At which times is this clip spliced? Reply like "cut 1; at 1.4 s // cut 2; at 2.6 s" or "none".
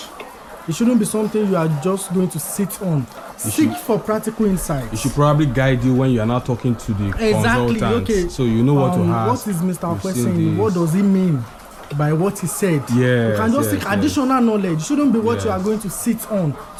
none